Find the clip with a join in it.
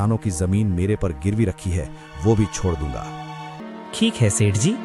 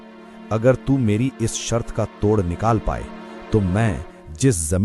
first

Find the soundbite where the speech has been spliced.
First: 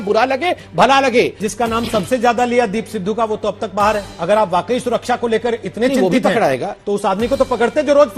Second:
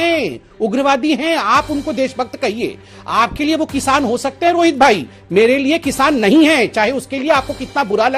first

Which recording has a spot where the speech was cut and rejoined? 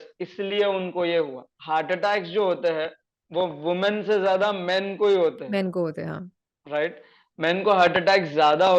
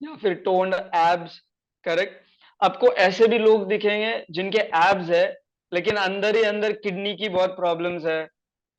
first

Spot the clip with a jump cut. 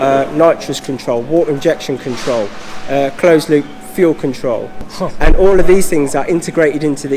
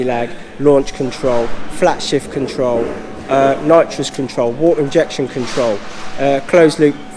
first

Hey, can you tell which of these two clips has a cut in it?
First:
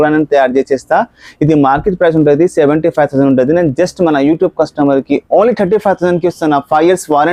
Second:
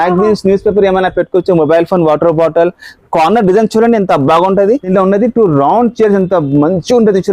second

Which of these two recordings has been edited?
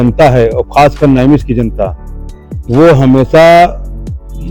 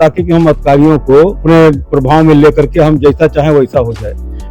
second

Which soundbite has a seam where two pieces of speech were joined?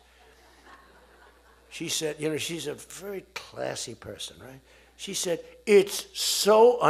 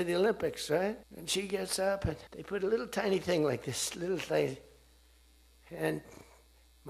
second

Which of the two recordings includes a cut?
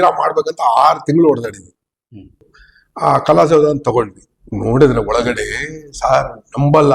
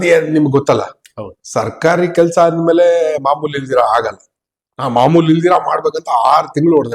first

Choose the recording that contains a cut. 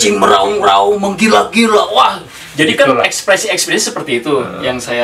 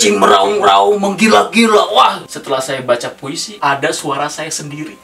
second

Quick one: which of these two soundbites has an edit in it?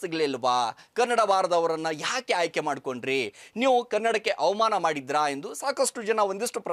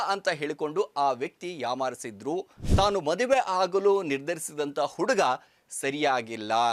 second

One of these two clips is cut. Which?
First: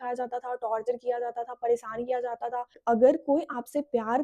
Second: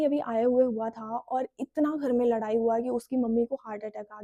first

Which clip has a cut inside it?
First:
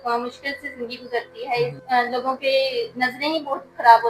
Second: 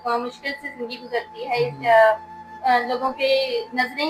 first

